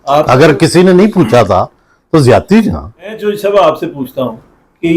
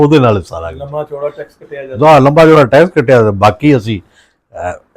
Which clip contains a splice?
first; 1 cut; at 3.2 s

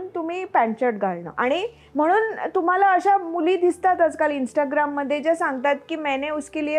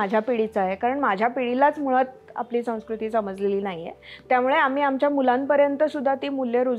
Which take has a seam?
first; 1 cut; at 1.2 s

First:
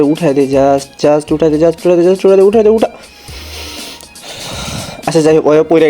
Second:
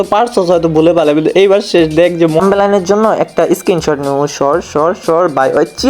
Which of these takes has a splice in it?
second; 1 cut; at 2.4 s

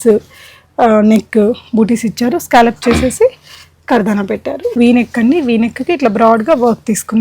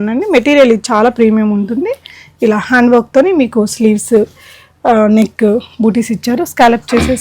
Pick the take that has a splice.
first; 1 cut; at 4.6 s

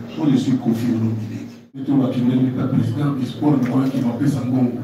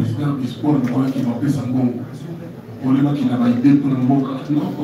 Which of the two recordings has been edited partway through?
first; 1 cut; at 1.8 s

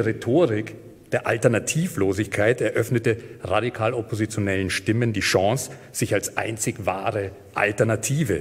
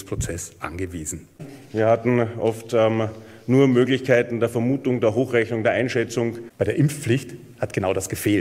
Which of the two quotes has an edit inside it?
second; 2 cuts; at 1.4 s, 6.4 s

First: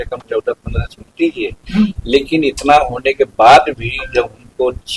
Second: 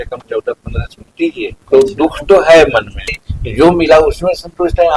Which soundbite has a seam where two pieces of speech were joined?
second; 2 cuts; at 1.5 s, 3.2 s

